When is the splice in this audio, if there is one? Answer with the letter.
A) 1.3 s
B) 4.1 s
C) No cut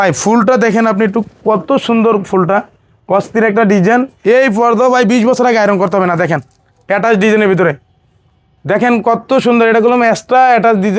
B